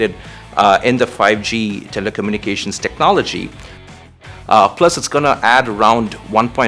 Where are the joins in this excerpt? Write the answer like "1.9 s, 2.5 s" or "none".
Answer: 3.9 s